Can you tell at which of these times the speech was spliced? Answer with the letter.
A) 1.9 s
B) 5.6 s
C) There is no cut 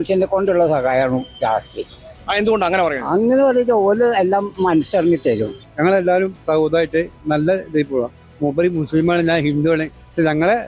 B